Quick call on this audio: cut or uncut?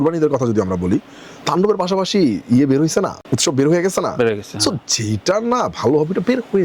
cut